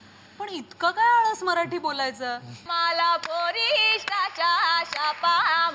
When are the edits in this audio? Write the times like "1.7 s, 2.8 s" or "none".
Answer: 2.6 s